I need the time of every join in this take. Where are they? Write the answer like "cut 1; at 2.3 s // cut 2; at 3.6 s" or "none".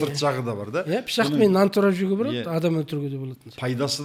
none